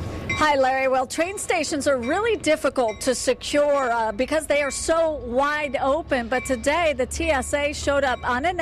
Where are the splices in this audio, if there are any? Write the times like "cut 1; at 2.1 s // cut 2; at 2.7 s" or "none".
cut 1; at 4.7 s